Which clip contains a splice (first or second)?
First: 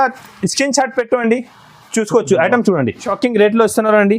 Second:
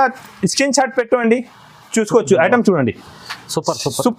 first